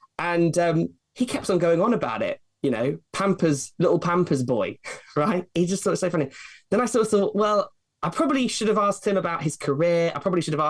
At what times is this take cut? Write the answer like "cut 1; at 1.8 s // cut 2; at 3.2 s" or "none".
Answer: none